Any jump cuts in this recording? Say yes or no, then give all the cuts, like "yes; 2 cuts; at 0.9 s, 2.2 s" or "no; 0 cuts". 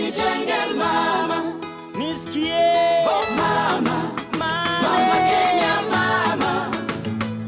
no; 0 cuts